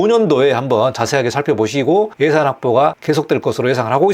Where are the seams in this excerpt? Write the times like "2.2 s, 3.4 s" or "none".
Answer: none